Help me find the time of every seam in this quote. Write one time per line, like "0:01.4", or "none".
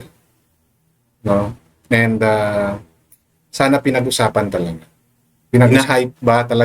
0:05.7